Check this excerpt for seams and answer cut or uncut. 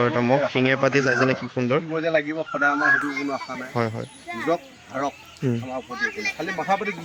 uncut